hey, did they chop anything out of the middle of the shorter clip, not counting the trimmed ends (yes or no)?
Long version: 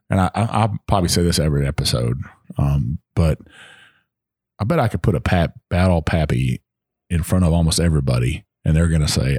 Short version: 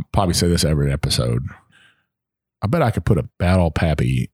yes